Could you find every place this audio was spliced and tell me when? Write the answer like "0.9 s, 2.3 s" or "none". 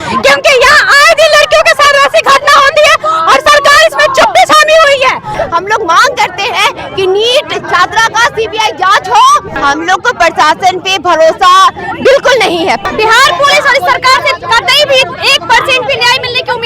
5.3 s, 9.5 s, 12.8 s